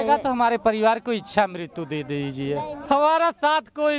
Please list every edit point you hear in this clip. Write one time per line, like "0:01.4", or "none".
0:02.8